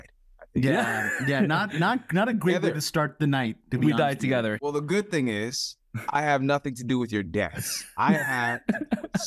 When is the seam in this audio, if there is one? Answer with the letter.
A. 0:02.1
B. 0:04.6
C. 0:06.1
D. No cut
B